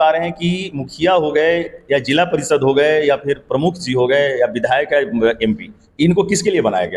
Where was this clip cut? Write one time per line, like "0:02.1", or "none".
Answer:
none